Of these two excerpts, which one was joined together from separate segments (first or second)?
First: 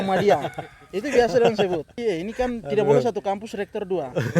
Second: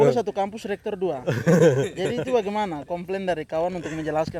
first